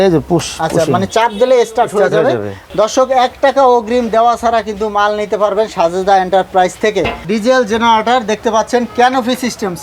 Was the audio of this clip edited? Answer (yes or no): yes